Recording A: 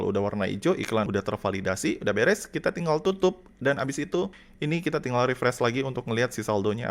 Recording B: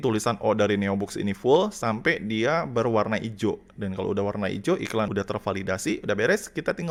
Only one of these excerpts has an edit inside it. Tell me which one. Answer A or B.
A